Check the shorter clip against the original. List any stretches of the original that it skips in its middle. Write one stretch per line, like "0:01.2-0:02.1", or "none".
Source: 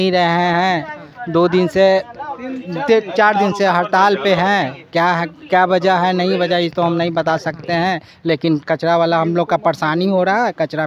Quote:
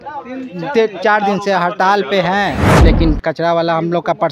0:04.8-0:08.1